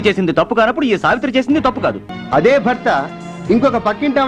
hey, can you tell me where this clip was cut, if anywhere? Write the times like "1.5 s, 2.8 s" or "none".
2.1 s